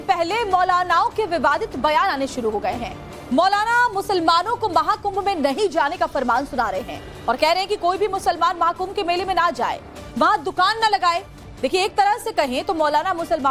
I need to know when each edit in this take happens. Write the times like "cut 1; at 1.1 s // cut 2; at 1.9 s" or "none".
none